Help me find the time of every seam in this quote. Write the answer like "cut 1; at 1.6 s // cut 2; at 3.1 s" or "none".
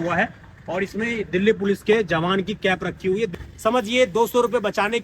cut 1; at 3.3 s